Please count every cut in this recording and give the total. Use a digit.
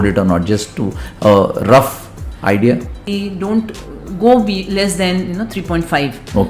1